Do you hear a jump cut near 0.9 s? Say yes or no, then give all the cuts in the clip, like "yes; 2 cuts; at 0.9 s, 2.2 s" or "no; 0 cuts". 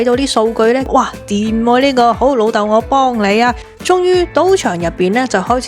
yes; 2 cuts; at 0.9 s, 3.7 s